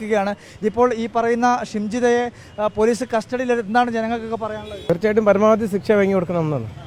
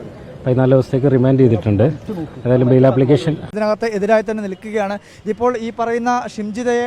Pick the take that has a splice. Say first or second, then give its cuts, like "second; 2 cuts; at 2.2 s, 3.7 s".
second; 1 cut; at 3.4 s